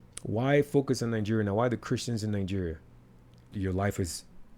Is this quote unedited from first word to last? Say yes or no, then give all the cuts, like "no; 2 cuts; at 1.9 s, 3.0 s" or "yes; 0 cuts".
no; 1 cut; at 3.5 s